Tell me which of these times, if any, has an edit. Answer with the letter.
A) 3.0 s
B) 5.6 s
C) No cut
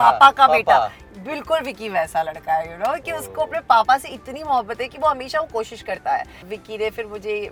C